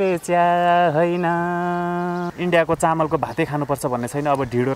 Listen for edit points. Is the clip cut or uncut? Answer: cut